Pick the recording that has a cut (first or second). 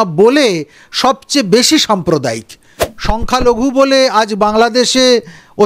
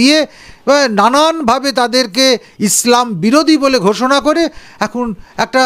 first